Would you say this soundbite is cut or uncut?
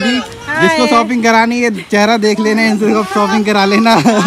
uncut